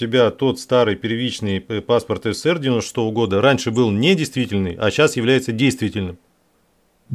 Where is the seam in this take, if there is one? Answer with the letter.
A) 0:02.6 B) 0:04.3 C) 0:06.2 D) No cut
D